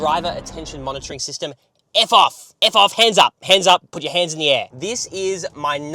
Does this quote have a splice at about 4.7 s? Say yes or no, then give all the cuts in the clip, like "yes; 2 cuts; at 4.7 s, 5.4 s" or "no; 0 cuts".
yes; 1 cut; at 4.7 s